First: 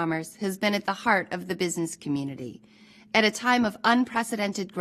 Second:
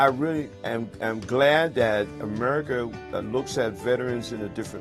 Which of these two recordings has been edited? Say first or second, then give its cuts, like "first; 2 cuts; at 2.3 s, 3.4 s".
second; 1 cut; at 2.2 s